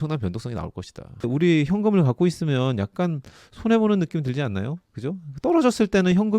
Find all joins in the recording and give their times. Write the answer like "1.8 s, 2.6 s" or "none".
1.1 s